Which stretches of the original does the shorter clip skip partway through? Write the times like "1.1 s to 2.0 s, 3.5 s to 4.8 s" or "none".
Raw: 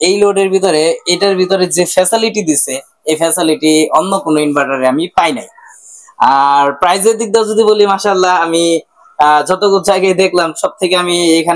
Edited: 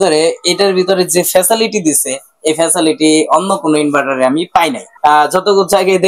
5.5 s to 9.0 s